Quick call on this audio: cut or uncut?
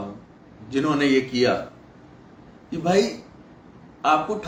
uncut